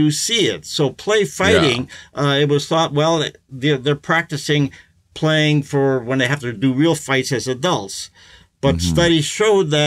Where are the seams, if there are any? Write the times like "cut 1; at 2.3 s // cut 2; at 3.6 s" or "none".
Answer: none